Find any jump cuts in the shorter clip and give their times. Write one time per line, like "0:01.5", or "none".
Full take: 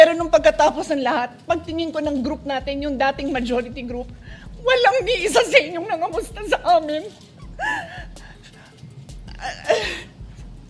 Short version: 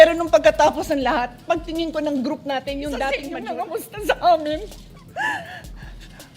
0:03.4